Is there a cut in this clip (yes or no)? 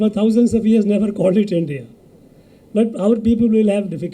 no